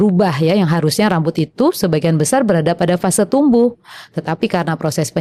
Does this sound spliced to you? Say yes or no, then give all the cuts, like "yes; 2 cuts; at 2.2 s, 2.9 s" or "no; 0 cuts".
no; 0 cuts